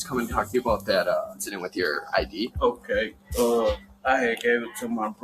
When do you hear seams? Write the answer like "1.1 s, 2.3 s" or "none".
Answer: 1.4 s, 2.5 s